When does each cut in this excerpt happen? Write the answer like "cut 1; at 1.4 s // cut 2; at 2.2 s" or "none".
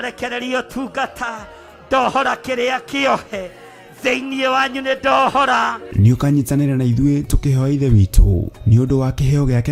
none